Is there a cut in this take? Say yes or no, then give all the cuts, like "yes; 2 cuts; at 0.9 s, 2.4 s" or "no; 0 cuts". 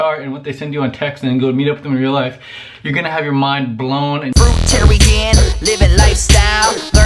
yes; 1 cut; at 4.3 s